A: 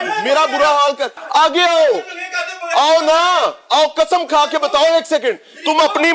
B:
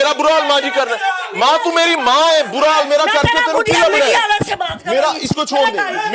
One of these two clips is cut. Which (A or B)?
A